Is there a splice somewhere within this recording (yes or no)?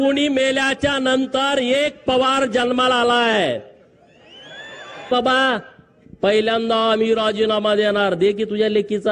yes